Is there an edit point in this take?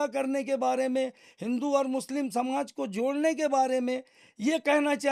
no; 0 cuts

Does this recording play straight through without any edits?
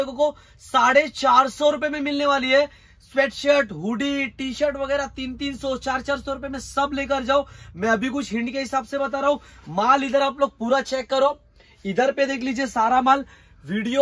yes; 0 cuts

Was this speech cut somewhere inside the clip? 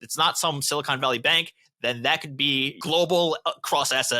yes; 1 cut; at 2.8 s

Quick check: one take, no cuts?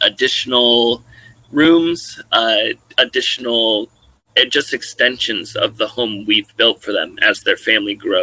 yes; 0 cuts

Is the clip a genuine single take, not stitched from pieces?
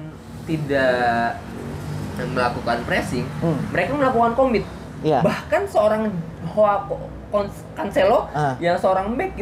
yes; 0 cuts

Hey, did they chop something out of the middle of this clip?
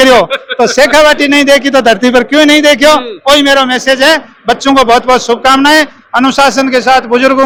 no; 0 cuts

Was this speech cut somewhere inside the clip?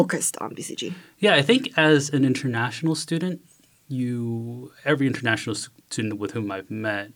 no; 0 cuts

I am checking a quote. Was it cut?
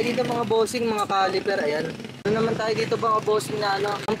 yes; 1 cut; at 2.2 s

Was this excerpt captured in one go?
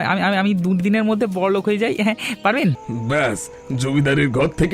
no; 1 cut; at 2.9 s

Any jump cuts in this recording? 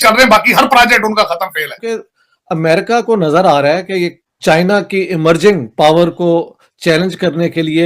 yes; 2 cuts; at 2.2 s, 4.2 s

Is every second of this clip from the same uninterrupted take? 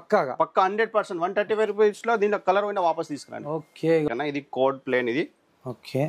no; 1 cut; at 4.1 s

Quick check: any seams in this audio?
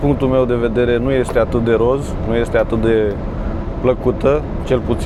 no; 0 cuts

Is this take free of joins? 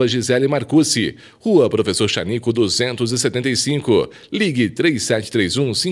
yes; 0 cuts

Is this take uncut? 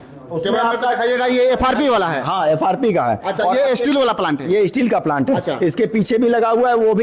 yes; 0 cuts

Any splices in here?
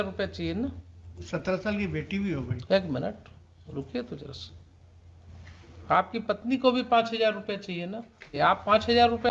yes; 1 cut; at 8.4 s

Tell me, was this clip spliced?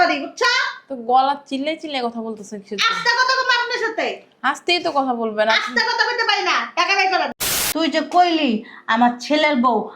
yes; 1 cut; at 7.4 s

